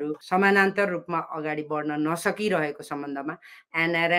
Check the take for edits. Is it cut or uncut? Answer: uncut